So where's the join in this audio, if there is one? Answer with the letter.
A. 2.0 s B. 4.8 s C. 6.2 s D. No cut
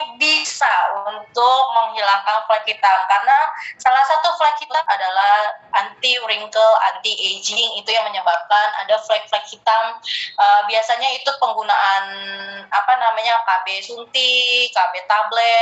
B